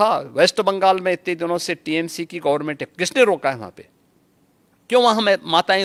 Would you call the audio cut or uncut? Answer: uncut